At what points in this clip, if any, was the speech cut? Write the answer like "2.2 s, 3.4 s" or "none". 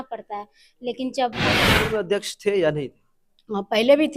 1.5 s